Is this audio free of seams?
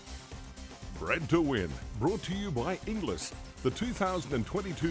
no; 1 cut; at 1.0 s

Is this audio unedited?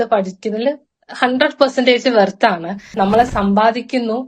no; 1 cut; at 2.9 s

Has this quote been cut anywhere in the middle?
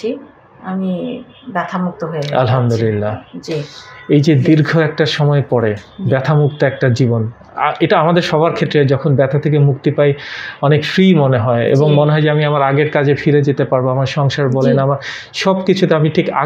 no; 0 cuts

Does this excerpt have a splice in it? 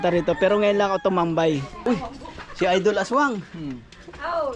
yes; 1 cut; at 1.7 s

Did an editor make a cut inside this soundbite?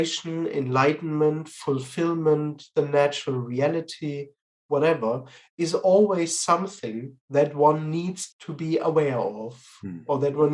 yes; 1 cut; at 8.3 s

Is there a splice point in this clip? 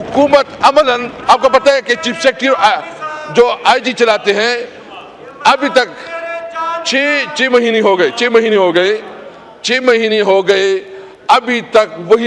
no; 0 cuts

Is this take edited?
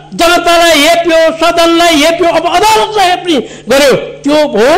no; 0 cuts

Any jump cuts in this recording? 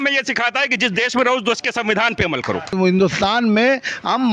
yes; 1 cut; at 2.7 s

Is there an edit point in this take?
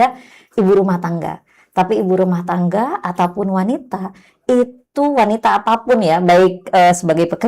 no; 0 cuts

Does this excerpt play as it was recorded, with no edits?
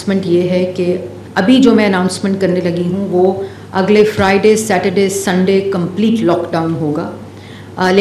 no; 1 cut; at 1.2 s

